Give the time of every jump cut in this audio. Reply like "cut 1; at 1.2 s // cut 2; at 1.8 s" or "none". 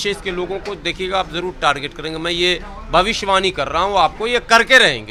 none